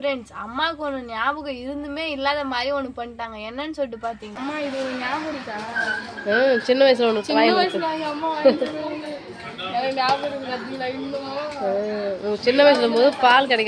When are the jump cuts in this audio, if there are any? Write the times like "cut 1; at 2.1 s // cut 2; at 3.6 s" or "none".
cut 1; at 4.3 s

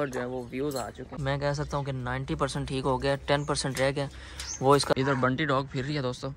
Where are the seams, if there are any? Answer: cut 1; at 1.1 s // cut 2; at 4.9 s

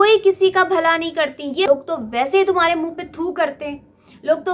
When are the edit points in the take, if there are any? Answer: cut 1; at 1.7 s

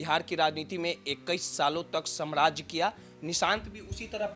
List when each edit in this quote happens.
none

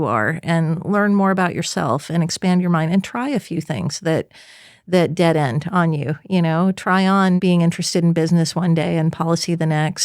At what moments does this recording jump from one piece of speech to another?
cut 1; at 7.4 s

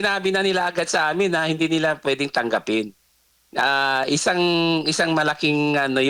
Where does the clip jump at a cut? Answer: none

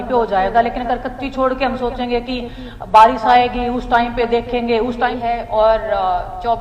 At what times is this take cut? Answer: cut 1; at 5.2 s

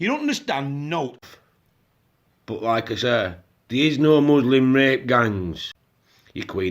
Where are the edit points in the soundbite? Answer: cut 1; at 1.3 s // cut 2; at 5.4 s

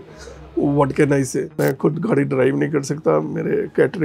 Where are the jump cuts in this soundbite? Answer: cut 1; at 1.4 s

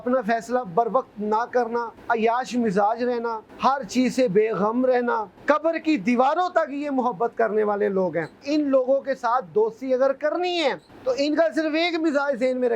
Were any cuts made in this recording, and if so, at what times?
cut 1; at 1.9 s // cut 2; at 3.5 s // cut 3; at 5.3 s // cut 4; at 8.4 s // cut 5; at 10.9 s

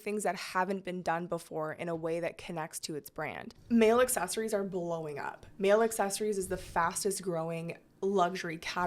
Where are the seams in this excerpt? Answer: cut 1; at 3.6 s

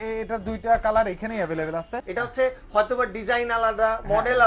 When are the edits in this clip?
cut 1; at 2.0 s

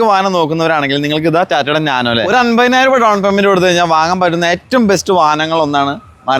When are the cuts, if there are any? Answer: cut 1; at 2.2 s

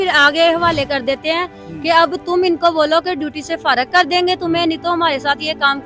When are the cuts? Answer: none

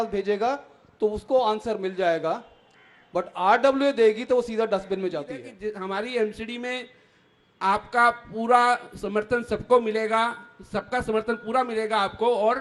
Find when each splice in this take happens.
cut 1; at 5.5 s

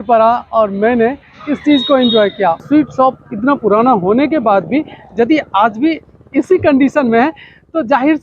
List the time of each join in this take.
cut 1; at 2.6 s

